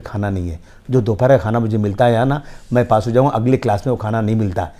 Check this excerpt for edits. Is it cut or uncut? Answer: uncut